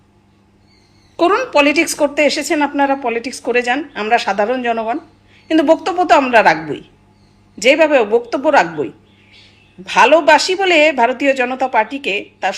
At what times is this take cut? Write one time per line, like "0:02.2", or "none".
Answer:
none